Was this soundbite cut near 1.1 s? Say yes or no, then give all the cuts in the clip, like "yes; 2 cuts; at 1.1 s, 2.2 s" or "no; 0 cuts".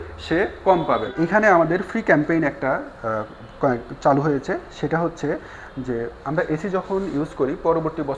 yes; 1 cut; at 1.1 s